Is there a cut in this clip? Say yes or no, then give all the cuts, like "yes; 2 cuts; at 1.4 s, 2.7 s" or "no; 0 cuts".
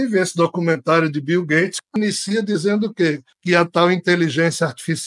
no; 0 cuts